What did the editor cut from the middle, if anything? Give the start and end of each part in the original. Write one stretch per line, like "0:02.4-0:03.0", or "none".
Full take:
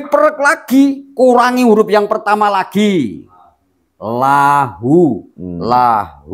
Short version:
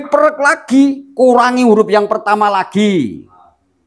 none